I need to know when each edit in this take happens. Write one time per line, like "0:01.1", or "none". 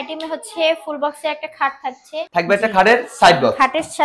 0:02.3

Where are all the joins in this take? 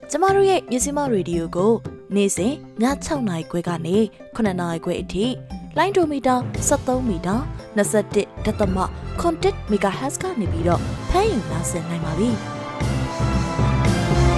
0:12.6

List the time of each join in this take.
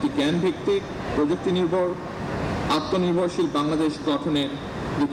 none

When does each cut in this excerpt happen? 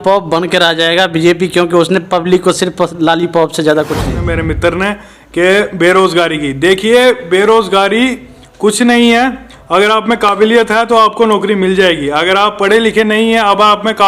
0:04.1

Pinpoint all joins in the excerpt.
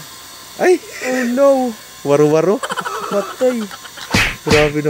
none

